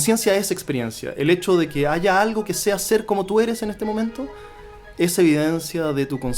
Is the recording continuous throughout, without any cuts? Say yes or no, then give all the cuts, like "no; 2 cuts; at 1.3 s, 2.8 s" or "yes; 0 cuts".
yes; 0 cuts